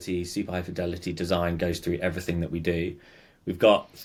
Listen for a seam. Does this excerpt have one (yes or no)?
no